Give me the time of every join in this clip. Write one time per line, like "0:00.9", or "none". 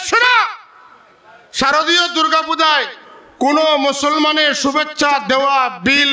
none